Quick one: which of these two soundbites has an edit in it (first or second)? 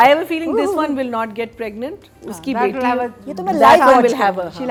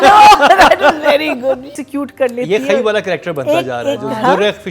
second